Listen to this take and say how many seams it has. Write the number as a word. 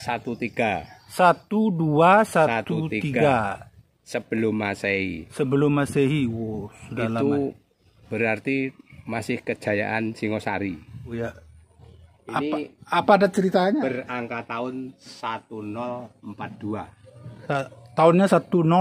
one